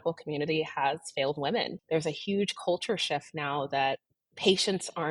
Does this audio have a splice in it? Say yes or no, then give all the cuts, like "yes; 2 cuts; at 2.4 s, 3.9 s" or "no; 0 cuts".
yes; 1 cut; at 1.8 s